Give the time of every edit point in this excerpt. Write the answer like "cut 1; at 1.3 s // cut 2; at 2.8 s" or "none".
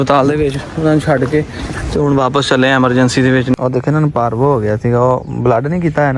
cut 1; at 3.5 s